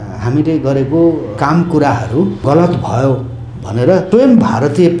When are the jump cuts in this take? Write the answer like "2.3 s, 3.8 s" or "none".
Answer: 1.3 s, 2.4 s, 4.1 s